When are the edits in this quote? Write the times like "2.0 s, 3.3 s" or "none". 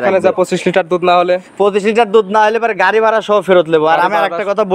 none